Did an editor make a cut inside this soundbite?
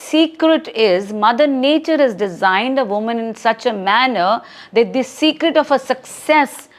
no; 0 cuts

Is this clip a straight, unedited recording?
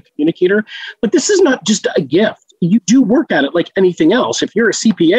yes; 0 cuts

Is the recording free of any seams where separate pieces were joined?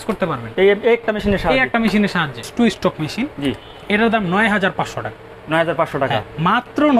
no; 1 cut; at 2.4 s

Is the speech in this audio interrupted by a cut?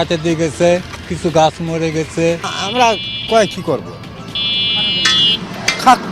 yes; 1 cut; at 2.6 s

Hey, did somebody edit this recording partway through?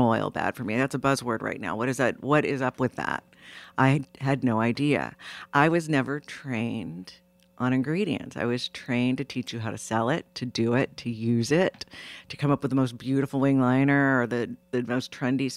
no; 0 cuts

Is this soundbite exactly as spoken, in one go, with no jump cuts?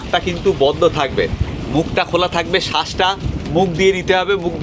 yes; 0 cuts

